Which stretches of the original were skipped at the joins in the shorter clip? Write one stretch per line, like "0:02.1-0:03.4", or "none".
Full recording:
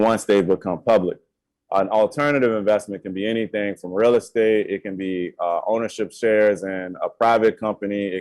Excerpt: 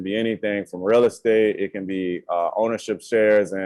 none